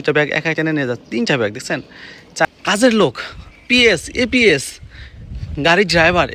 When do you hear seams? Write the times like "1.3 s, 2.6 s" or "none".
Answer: 2.5 s